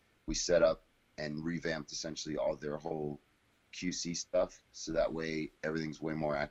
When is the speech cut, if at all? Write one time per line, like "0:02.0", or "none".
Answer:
none